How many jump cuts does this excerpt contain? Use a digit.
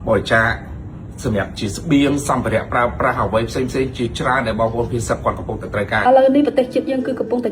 1